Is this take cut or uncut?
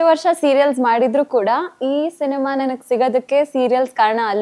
uncut